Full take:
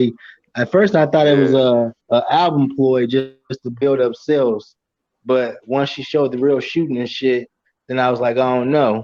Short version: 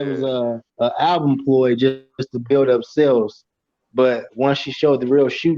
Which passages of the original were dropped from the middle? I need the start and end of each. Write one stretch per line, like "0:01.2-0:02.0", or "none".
none